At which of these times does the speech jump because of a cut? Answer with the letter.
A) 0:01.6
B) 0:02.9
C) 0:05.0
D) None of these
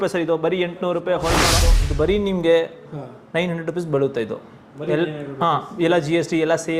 A